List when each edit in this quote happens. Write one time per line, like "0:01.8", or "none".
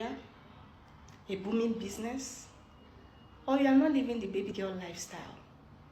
none